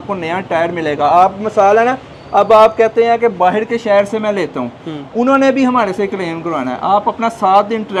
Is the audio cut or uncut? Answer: uncut